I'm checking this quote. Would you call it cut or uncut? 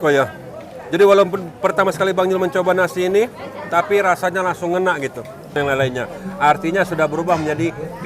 cut